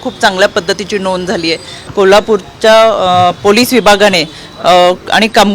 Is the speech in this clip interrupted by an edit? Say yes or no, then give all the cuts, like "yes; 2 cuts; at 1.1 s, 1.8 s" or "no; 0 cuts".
yes; 1 cut; at 1.8 s